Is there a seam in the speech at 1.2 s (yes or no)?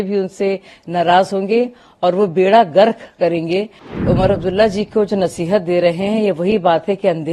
no